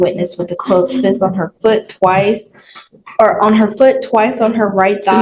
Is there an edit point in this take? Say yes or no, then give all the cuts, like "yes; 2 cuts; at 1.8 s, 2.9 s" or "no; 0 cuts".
no; 0 cuts